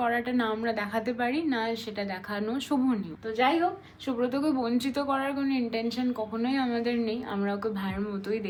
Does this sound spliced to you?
no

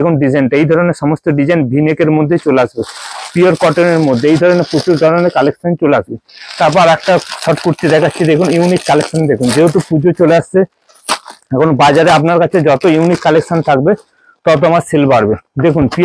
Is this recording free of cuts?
yes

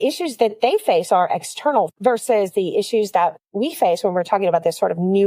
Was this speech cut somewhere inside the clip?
yes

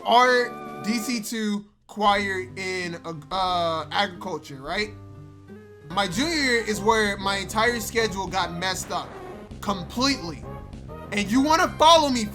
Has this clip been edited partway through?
yes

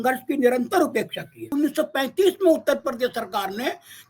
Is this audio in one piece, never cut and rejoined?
no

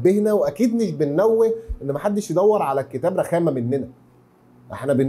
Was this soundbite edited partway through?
no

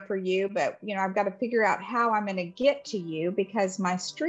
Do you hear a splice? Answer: no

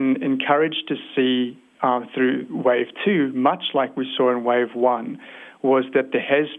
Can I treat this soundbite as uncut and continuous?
yes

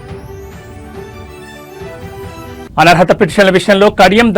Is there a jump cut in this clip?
yes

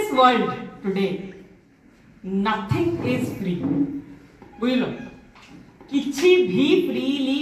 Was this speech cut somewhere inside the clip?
no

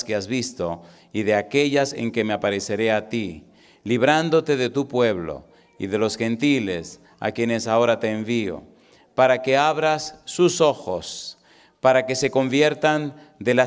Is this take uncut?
yes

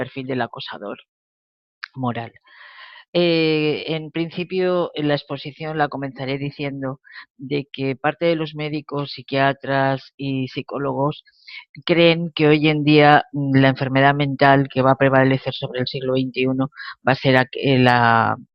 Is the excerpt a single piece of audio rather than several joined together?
yes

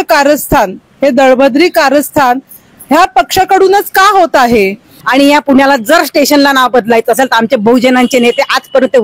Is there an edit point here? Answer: yes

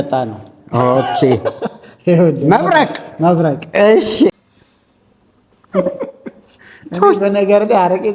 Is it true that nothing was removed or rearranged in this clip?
no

